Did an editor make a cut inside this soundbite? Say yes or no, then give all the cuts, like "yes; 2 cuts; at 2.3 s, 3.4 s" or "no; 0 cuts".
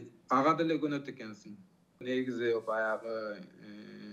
no; 0 cuts